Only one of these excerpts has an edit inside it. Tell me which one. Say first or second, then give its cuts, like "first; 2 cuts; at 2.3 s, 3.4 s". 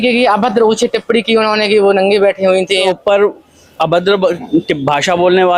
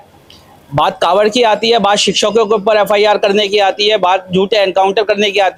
first; 1 cut; at 2.9 s